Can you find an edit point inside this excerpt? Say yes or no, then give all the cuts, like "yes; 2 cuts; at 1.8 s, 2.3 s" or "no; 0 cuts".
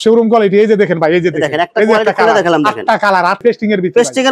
yes; 1 cut; at 3.4 s